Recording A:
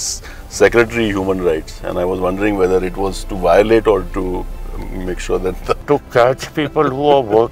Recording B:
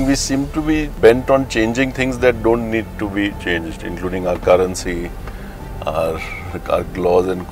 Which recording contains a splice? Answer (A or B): B